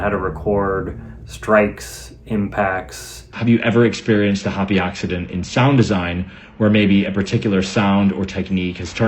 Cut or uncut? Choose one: cut